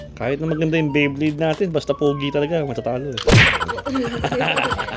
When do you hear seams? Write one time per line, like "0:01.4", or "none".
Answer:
none